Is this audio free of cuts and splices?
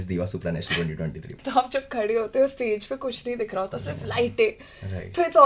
no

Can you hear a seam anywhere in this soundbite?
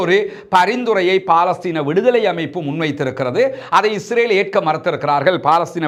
no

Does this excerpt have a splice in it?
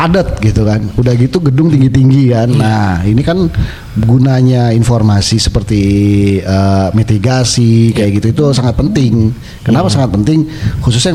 no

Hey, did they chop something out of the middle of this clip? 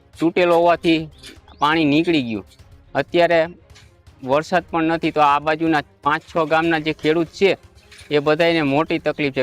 no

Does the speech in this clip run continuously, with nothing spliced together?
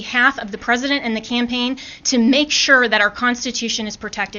yes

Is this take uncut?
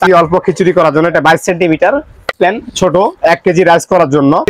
no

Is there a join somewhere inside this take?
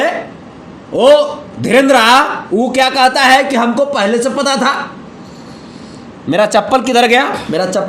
no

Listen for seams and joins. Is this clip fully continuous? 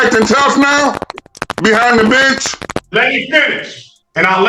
no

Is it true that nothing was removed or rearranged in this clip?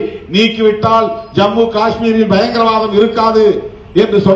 yes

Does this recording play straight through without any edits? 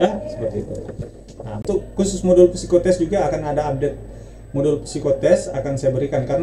no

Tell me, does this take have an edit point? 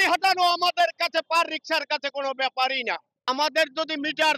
yes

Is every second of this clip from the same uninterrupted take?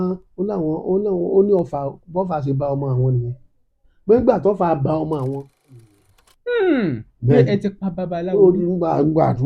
no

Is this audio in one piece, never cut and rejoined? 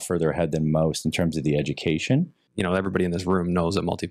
no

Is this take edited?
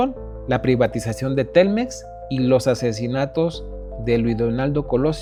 no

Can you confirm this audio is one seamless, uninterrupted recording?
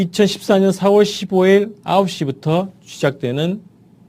no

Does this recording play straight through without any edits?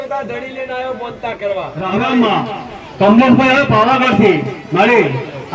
no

